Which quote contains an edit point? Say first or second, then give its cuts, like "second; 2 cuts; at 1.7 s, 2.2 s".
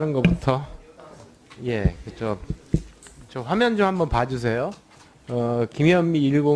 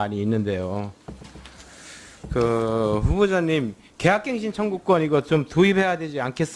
second; 1 cut; at 2.2 s